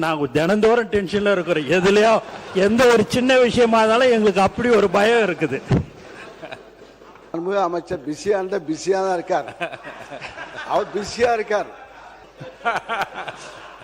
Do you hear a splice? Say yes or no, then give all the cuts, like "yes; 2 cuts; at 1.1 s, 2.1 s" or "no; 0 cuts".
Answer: yes; 2 cuts; at 7.4 s, 12.1 s